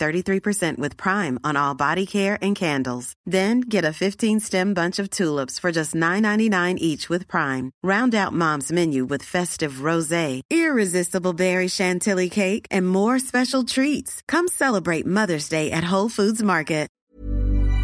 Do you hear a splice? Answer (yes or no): yes